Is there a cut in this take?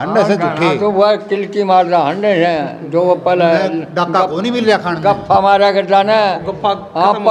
no; 0 cuts

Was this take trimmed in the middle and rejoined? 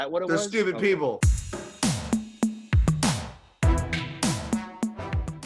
yes; 1 cut; at 1.2 s

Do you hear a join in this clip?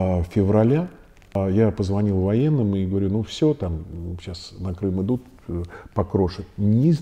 yes; 1 cut; at 1.3 s

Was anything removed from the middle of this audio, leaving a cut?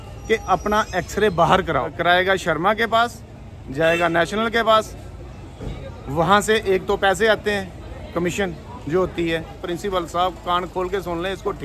yes; 2 cuts; at 1.9 s, 9.6 s

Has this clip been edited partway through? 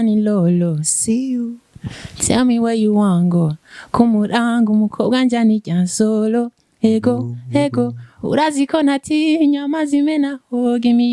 no; 0 cuts

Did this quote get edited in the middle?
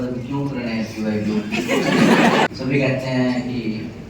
yes; 1 cut; at 2.5 s

